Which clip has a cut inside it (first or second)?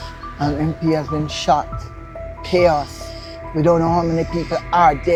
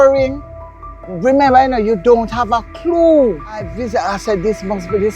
second